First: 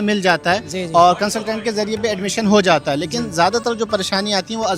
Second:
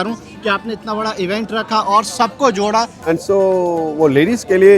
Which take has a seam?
second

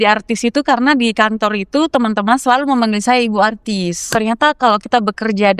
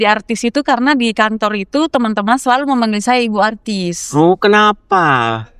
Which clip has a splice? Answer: first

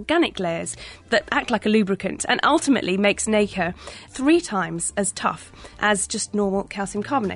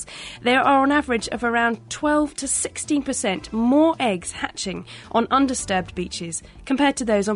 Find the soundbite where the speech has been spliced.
first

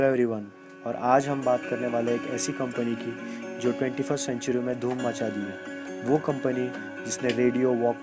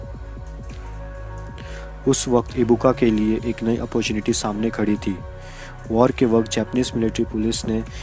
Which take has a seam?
first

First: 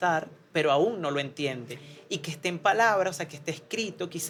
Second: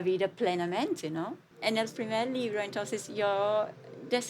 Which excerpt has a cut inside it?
second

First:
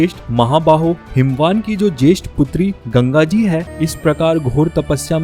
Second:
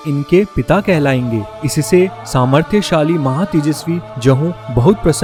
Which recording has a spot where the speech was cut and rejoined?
first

